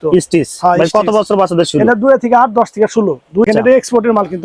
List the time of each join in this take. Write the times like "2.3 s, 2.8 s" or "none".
3.5 s